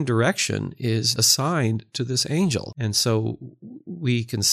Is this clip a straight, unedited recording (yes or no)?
no